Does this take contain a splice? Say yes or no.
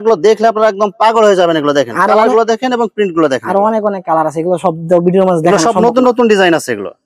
no